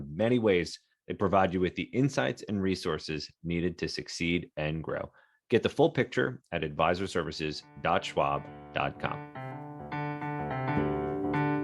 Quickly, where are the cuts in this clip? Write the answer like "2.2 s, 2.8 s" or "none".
9.2 s